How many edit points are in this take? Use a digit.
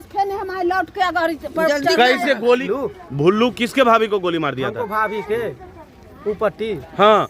1